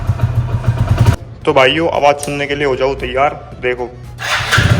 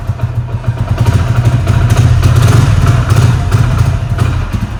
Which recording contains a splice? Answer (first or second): first